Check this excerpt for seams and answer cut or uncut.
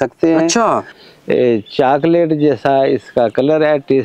cut